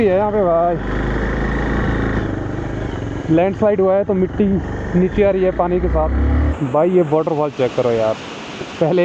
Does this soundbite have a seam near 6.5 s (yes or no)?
yes